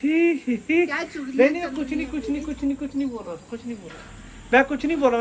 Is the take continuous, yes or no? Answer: yes